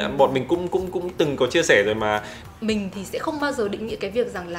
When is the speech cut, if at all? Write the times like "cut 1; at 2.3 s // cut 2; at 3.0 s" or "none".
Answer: cut 1; at 2.4 s